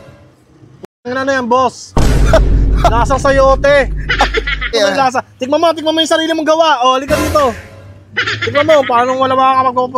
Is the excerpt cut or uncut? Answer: cut